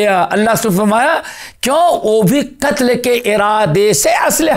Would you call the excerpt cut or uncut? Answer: uncut